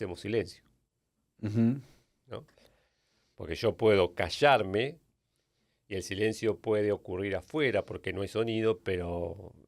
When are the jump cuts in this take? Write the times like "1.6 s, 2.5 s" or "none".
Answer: none